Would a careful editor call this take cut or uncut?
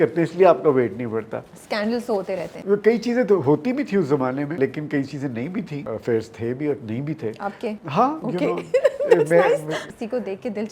cut